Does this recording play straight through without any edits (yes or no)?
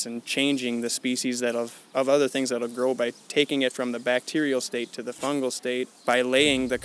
no